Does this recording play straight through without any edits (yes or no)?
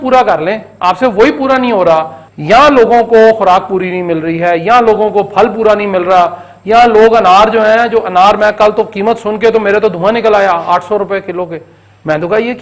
no